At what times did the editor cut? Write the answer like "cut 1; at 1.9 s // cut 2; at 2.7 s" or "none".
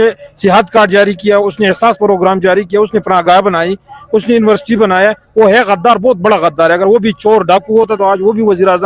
none